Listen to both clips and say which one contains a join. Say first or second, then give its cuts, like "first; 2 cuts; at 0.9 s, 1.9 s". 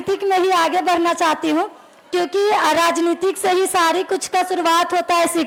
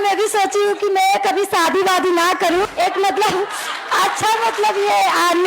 second; 1 cut; at 2.7 s